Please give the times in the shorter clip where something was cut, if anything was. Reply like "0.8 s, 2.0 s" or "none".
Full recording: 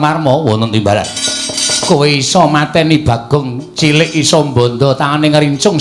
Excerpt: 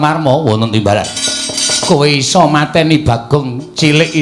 none